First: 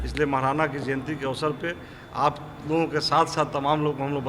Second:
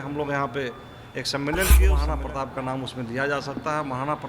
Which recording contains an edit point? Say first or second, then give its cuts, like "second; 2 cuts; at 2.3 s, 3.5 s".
second; 1 cut; at 2.0 s